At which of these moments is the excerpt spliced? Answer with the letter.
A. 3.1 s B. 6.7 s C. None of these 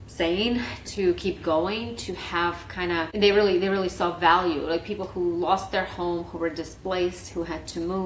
A